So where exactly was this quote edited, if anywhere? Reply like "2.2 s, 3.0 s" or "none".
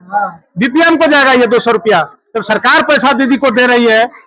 none